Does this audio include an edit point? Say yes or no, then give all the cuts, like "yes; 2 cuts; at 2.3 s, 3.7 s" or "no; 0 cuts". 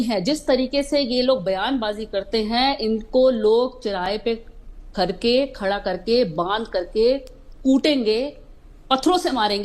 no; 0 cuts